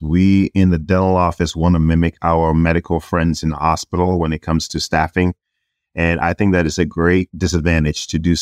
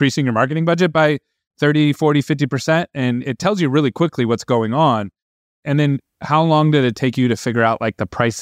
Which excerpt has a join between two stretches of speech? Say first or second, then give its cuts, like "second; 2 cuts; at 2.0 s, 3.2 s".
second; 1 cut; at 5.5 s